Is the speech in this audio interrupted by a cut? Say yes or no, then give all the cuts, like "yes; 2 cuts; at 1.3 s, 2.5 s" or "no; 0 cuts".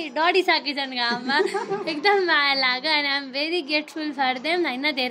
no; 0 cuts